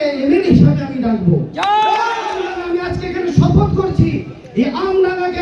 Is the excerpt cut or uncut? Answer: cut